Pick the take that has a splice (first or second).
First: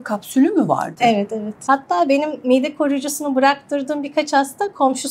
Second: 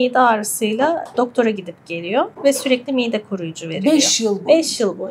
first